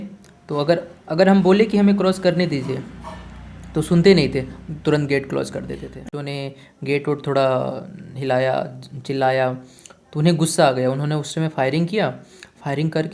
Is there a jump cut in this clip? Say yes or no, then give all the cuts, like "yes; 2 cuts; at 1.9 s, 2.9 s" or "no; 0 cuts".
yes; 1 cut; at 6.1 s